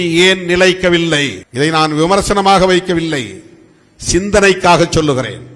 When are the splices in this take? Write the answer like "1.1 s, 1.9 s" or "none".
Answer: 1.4 s